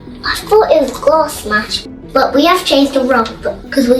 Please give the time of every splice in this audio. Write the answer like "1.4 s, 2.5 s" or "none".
1.7 s